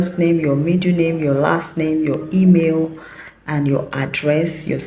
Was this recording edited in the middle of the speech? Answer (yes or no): no